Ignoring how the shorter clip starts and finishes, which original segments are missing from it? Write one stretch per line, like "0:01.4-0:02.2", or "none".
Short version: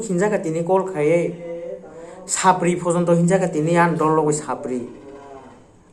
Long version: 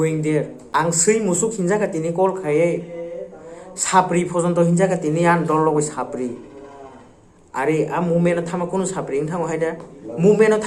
none